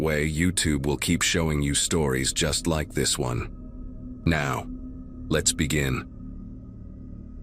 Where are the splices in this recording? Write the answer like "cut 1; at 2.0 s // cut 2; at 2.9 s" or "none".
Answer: cut 1; at 6.0 s